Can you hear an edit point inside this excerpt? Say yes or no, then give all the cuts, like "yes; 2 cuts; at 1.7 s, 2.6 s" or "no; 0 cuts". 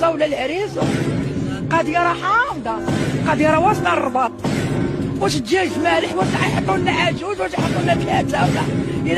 no; 0 cuts